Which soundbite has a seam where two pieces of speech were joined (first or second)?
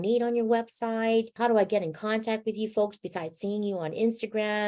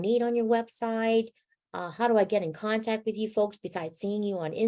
first